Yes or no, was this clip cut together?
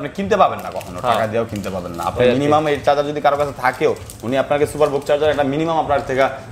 no